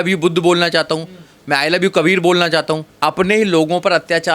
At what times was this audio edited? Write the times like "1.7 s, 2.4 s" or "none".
2.9 s